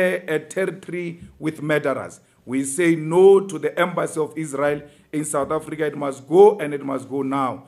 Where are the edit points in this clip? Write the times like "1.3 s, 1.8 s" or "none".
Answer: none